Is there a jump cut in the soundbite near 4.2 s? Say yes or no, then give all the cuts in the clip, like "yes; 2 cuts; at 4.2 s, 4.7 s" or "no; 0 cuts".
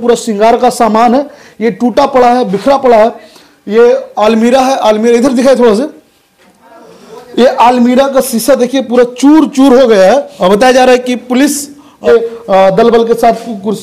no; 2 cuts; at 10.3 s, 12.0 s